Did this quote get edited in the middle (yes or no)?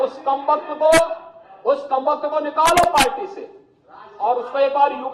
no